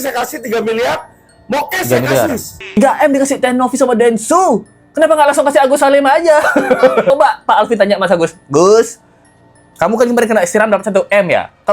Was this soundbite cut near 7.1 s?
yes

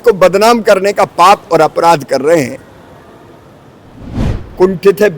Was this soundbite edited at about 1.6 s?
no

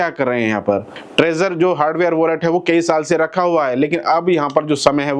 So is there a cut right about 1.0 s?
yes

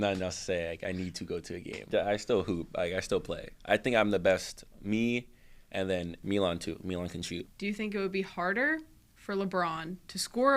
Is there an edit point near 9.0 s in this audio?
no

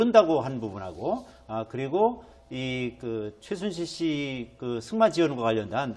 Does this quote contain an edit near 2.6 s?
yes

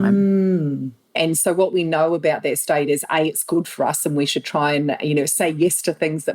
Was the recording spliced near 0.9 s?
yes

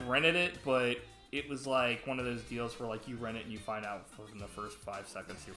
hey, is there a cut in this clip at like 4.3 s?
no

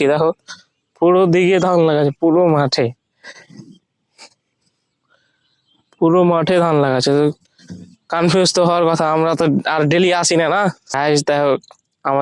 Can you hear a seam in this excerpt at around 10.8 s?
yes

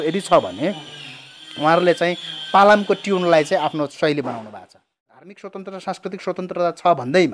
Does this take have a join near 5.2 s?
yes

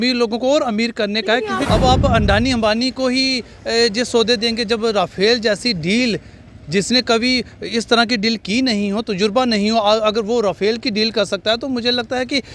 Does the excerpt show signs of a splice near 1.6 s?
yes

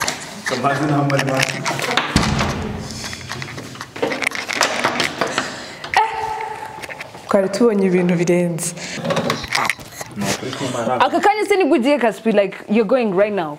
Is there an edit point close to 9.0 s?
yes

